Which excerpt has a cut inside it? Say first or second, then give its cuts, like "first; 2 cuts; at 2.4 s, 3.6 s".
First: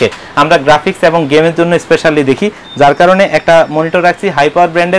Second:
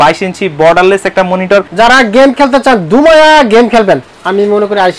second; 1 cut; at 1.7 s